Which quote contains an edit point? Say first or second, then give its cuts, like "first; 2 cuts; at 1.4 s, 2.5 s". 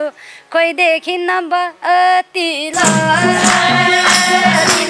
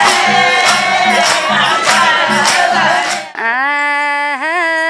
second; 1 cut; at 3.2 s